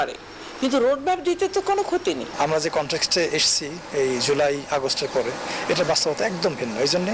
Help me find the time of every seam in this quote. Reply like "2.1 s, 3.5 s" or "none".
2.3 s